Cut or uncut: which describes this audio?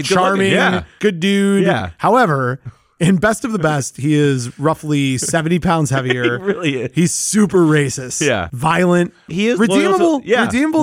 cut